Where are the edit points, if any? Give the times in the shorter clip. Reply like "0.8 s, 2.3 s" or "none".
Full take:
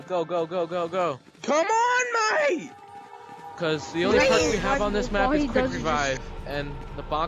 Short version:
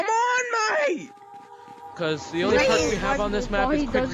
none